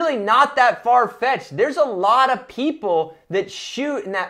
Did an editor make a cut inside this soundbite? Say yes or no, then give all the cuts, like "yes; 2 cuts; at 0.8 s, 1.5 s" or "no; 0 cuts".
no; 0 cuts